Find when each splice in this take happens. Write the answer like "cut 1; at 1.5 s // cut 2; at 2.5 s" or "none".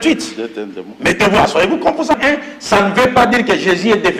cut 1; at 2.2 s

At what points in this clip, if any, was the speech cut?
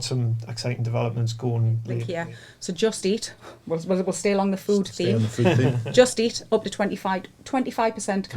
cut 1; at 2.1 s

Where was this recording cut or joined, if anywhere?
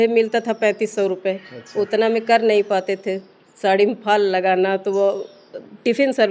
none

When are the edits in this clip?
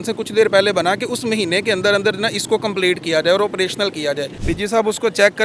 cut 1; at 4.4 s

